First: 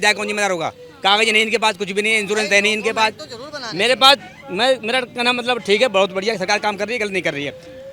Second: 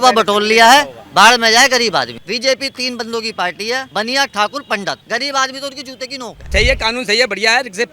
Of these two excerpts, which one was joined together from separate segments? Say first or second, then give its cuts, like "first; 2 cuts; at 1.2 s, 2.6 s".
second; 4 cuts; at 2.2 s, 3.9 s, 5.0 s, 6.5 s